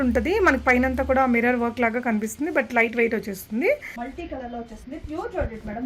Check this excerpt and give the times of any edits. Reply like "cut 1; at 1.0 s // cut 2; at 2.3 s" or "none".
cut 1; at 4.0 s